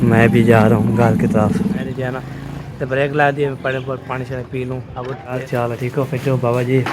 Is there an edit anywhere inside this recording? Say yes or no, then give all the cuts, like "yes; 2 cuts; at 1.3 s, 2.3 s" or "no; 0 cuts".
yes; 2 cuts; at 1.8 s, 5.4 s